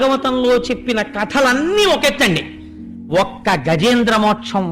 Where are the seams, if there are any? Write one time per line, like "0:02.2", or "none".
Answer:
none